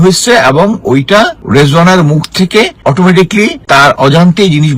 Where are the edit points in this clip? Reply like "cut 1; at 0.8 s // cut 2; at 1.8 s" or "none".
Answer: cut 1; at 1.4 s // cut 2; at 2.7 s // cut 3; at 3.6 s